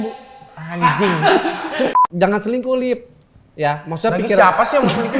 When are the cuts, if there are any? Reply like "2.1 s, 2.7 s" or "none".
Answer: 2.0 s